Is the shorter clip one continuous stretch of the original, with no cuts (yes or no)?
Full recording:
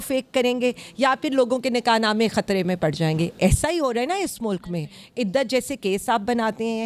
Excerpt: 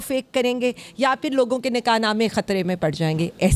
yes